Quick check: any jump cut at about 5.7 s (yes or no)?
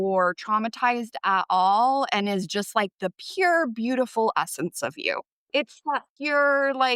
yes